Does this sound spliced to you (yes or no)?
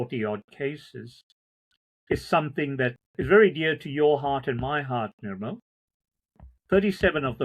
yes